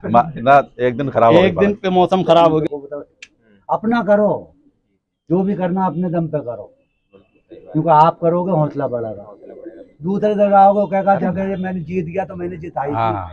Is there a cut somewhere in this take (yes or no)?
yes